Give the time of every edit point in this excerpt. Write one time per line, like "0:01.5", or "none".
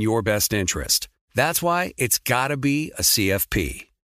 none